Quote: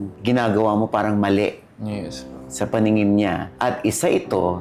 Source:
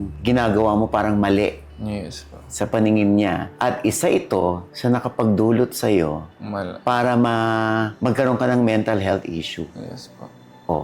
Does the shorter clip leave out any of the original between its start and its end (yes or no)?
no